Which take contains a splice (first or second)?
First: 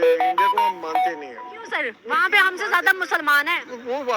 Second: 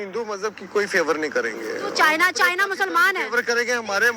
first